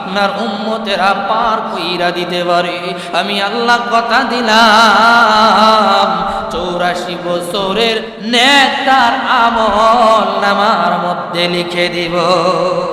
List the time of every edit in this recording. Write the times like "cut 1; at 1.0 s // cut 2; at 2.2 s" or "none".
cut 1; at 8.1 s